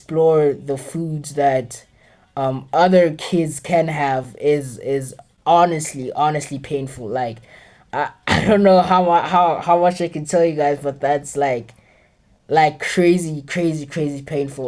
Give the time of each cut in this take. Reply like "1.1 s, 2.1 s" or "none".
none

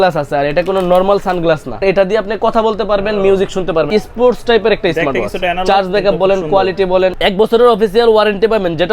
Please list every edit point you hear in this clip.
1.8 s, 3.9 s, 7.2 s

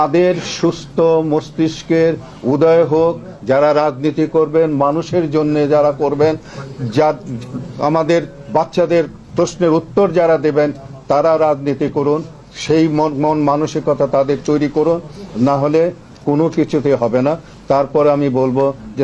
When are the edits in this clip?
none

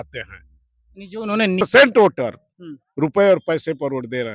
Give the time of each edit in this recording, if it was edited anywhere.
1.6 s

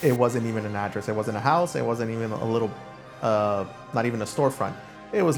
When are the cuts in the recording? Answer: none

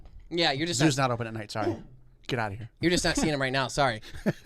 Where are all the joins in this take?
none

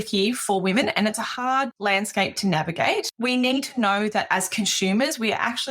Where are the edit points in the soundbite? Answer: 1.7 s, 3.1 s

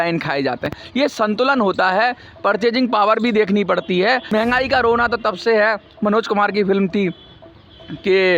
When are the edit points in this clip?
4.2 s

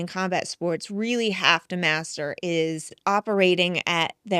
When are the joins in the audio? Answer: 2.9 s

